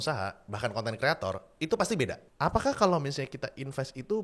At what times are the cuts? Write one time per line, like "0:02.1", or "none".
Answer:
0:02.2